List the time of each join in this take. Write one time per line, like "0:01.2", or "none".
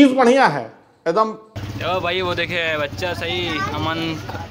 0:01.0